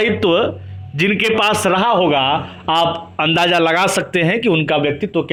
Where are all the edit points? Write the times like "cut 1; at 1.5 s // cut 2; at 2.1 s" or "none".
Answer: none